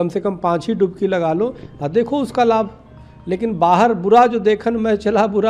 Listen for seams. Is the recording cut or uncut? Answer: uncut